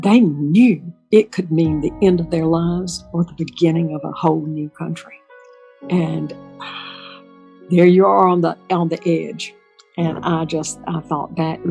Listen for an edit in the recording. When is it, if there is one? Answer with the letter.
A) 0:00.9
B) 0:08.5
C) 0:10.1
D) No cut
A